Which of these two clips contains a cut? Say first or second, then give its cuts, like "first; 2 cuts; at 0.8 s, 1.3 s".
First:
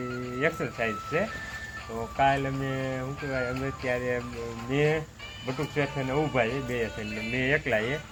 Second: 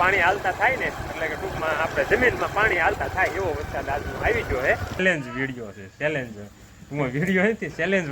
second; 1 cut; at 5.0 s